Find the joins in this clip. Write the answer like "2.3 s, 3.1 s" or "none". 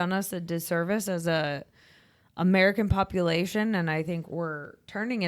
4.2 s